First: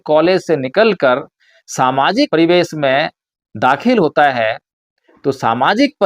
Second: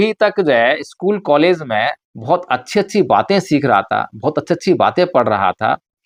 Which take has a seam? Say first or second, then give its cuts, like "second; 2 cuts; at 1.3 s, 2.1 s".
first; 1 cut; at 2.3 s